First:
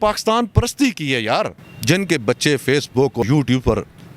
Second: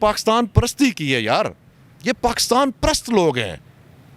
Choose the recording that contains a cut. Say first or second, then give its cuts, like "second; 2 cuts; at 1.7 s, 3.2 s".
first; 2 cuts; at 1.7 s, 3.2 s